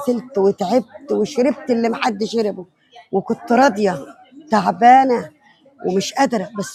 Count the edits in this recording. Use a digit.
0